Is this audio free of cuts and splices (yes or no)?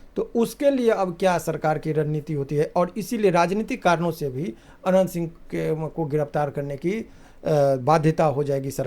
yes